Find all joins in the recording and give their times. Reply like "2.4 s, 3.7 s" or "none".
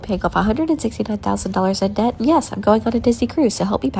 none